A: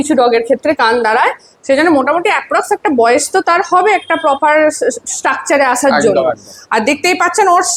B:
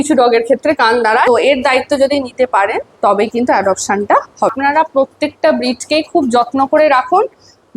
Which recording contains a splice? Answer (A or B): B